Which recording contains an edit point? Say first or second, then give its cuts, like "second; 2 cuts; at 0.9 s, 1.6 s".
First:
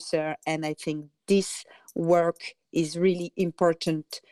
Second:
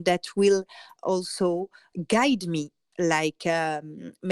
second; 3 cuts; at 0.9 s, 1.9 s, 2.8 s